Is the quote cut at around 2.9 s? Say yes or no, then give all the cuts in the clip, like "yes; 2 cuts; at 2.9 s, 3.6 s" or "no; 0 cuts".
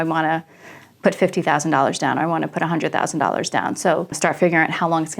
no; 1 cut; at 4.2 s